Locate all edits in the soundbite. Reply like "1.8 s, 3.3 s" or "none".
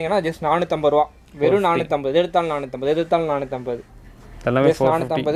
none

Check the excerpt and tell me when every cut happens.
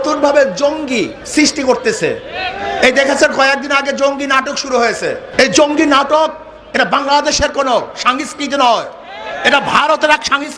5.3 s

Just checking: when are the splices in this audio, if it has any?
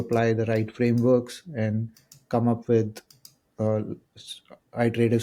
none

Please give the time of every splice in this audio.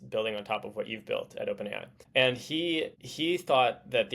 1.9 s, 3.0 s

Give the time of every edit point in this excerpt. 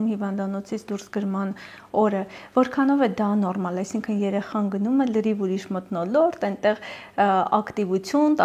none

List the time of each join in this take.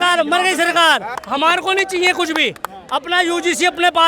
1.1 s

